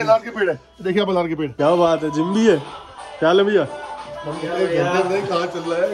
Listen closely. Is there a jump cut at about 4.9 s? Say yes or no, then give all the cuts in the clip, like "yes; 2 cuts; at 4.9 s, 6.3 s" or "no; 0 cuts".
no; 1 cut; at 1.6 s